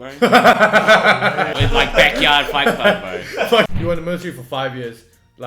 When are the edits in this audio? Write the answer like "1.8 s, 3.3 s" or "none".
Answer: 1.5 s, 3.7 s